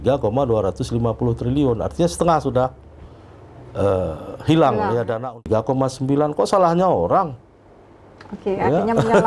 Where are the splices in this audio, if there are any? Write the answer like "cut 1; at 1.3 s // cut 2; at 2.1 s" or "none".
cut 1; at 5.4 s